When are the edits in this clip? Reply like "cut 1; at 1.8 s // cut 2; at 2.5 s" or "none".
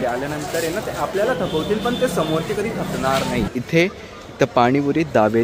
cut 1; at 3.5 s